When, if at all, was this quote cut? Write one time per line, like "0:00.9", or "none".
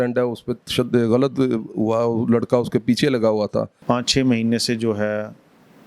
0:03.7